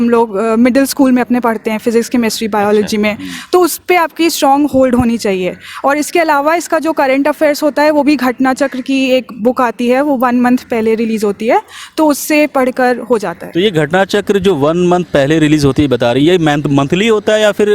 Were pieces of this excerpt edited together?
no; 0 cuts

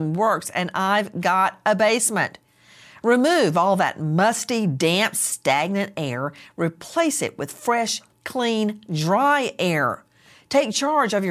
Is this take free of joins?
yes; 0 cuts

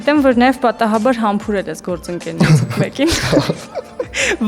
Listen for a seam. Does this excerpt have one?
no; 0 cuts

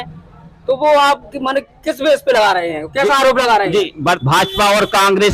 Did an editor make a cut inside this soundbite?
yes; 1 cut; at 4.2 s

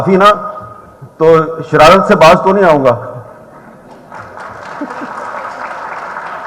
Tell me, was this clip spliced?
no; 0 cuts

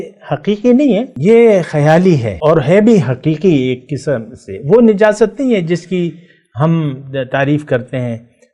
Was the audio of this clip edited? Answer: yes; 2 cuts; at 1.1 s, 2.3 s

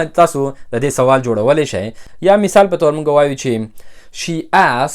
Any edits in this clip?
no; 0 cuts

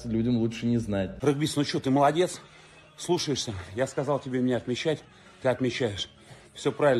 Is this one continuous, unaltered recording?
no; 1 cut; at 1.1 s

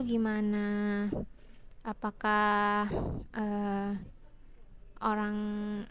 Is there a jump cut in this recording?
no; 0 cuts

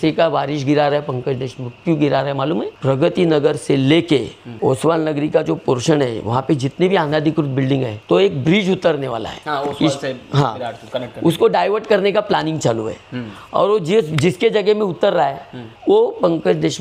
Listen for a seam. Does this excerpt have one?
no; 0 cuts

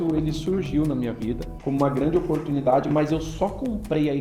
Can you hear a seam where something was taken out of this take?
yes; 1 cut; at 1.5 s

